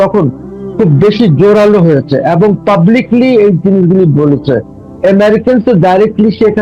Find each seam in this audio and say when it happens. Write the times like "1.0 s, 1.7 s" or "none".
none